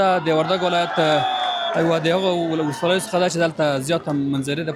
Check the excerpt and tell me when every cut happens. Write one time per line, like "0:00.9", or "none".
none